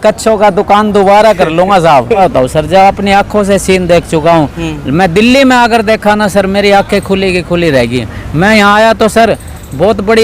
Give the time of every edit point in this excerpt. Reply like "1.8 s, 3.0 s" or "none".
2.2 s